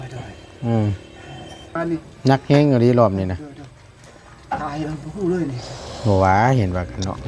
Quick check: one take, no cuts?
no; 1 cut; at 1.7 s

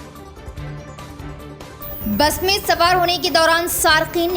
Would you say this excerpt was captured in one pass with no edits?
yes; 0 cuts

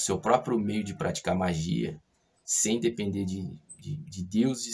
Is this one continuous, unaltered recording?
yes; 0 cuts

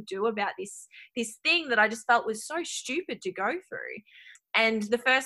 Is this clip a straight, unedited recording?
no; 1 cut; at 4.3 s

